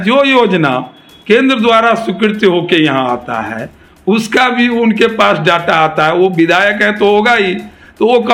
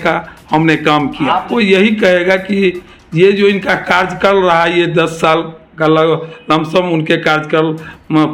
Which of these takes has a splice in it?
second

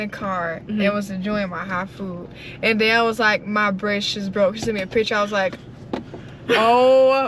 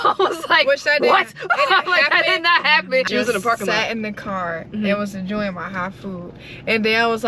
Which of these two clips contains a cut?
second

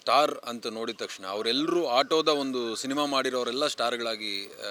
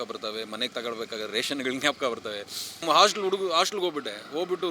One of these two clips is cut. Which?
second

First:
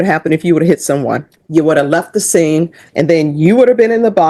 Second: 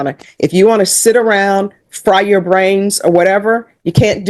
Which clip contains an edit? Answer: first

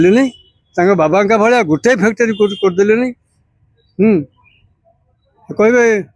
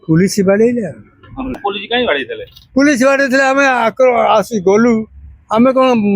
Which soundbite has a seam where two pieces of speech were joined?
second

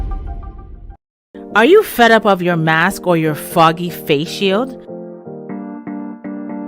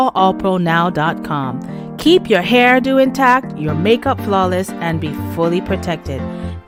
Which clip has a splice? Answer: first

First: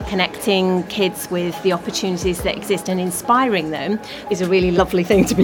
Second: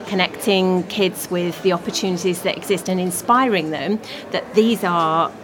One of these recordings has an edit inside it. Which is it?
first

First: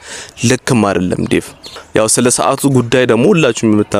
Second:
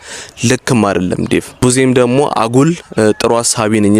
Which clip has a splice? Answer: second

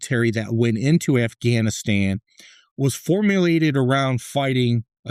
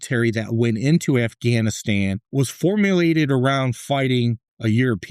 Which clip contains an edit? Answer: second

